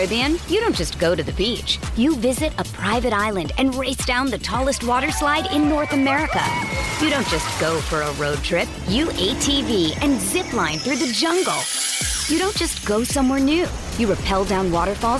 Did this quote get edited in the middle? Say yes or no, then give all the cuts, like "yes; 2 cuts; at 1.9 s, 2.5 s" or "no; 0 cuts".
no; 0 cuts